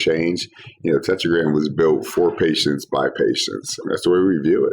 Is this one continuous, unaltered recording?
no; 1 cut; at 3.8 s

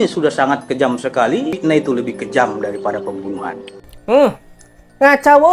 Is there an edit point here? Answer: yes; 1 cut; at 1.6 s

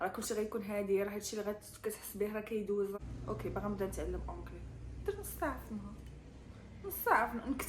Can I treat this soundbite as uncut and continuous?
no; 1 cut; at 3.0 s

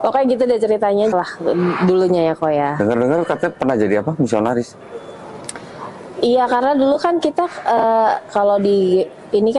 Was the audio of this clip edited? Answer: yes; 1 cut; at 1.1 s

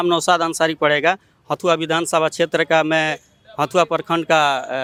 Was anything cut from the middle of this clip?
no; 0 cuts

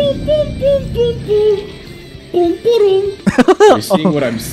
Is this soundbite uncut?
no; 1 cut; at 3.1 s

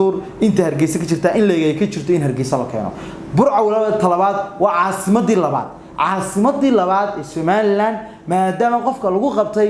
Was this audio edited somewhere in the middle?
no; 0 cuts

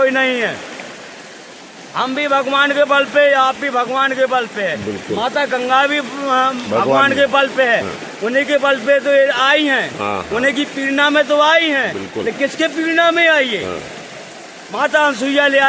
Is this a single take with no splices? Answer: yes; 0 cuts

